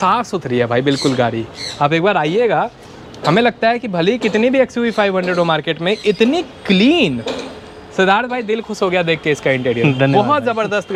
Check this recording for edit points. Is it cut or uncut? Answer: uncut